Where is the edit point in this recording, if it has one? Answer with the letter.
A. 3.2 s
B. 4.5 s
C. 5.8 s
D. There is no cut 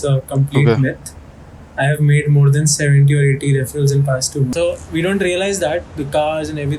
B